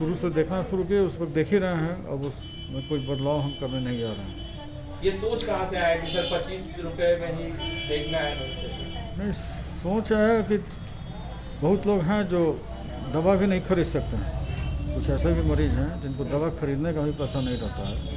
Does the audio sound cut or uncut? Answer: uncut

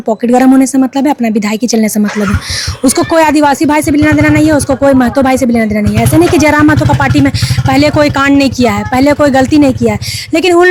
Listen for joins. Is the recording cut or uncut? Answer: uncut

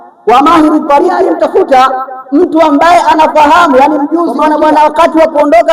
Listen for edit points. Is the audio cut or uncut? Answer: cut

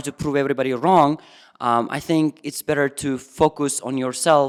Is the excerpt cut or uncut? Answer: uncut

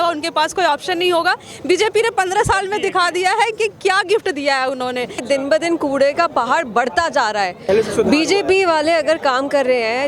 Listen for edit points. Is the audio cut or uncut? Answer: cut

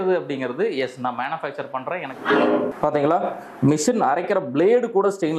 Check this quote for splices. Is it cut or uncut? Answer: cut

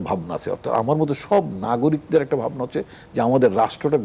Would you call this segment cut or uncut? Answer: uncut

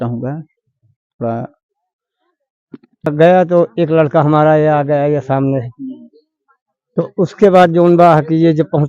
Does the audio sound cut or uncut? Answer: cut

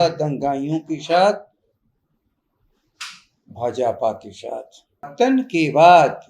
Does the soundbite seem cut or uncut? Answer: cut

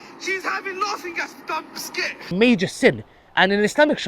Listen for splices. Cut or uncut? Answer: cut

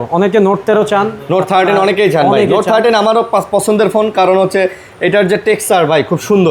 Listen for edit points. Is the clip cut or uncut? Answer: uncut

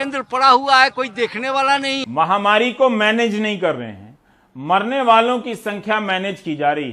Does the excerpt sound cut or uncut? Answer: cut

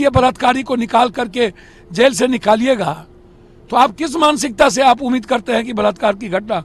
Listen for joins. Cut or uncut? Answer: uncut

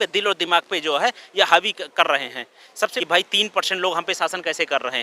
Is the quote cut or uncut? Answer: cut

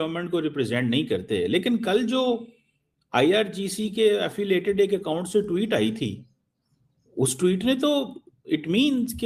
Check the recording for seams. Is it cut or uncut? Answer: uncut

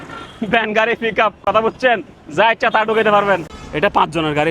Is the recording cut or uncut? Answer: cut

